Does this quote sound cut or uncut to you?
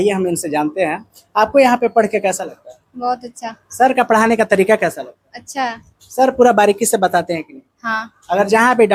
uncut